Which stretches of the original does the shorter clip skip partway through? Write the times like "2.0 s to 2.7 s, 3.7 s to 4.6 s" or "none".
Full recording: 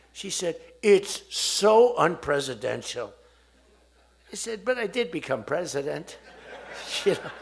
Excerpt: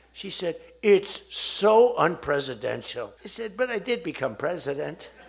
3.2 s to 4.3 s